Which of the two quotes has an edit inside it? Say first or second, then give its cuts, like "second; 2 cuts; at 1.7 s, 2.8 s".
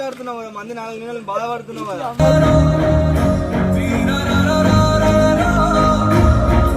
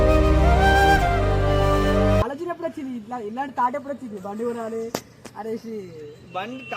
second; 1 cut; at 2.2 s